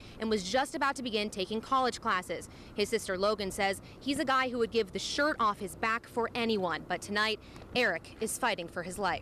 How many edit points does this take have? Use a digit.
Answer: 0